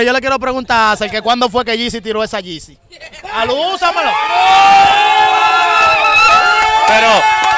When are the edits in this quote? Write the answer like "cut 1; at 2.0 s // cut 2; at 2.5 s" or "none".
none